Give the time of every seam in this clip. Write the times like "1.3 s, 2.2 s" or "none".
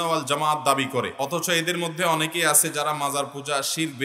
1.1 s